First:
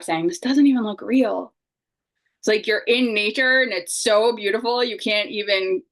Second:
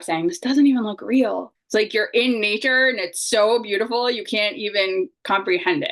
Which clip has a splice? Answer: second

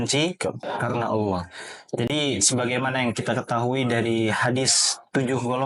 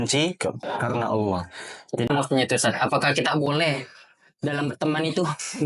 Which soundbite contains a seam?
second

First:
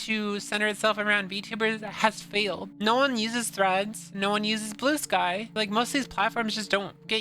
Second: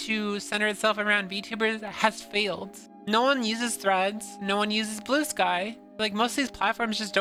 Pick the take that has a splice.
first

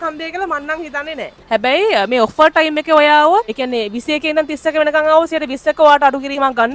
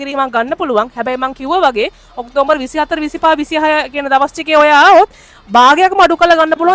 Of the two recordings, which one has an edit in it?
first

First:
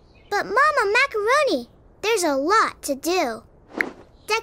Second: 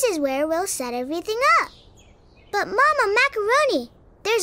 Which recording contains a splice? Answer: first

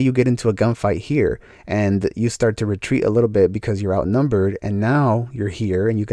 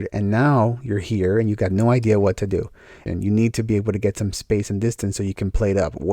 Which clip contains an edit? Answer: second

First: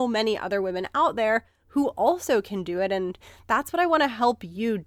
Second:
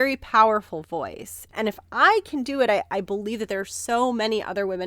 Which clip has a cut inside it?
second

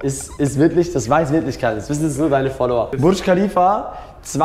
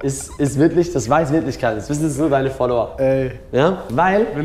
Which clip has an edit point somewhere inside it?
first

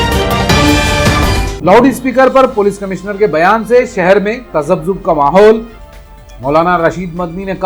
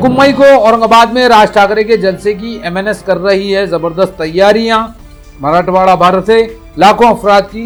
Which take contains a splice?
first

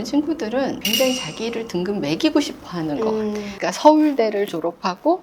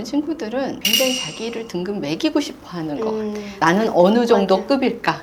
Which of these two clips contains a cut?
first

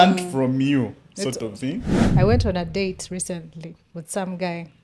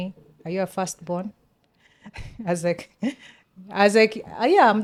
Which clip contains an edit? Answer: first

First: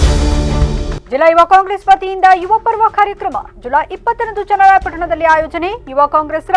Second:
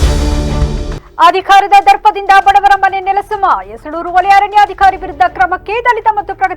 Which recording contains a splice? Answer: second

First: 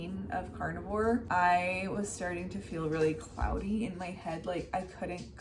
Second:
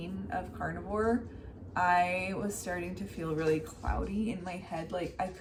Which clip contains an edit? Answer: first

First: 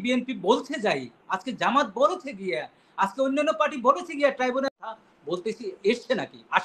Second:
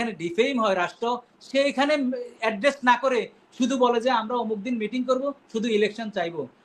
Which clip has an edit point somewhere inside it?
first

